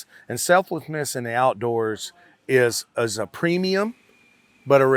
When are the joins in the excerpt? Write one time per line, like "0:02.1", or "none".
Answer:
none